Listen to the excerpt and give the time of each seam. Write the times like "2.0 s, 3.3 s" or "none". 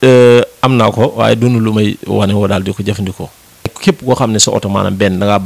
3.7 s